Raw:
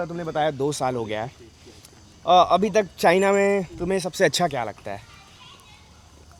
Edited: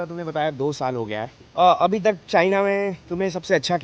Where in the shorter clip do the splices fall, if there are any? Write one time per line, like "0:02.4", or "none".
0:01.4